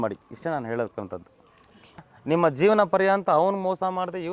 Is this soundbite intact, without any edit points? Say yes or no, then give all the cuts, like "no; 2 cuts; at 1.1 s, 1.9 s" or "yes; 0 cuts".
no; 1 cut; at 2.1 s